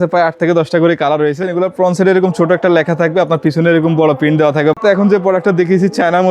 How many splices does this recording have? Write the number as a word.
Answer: two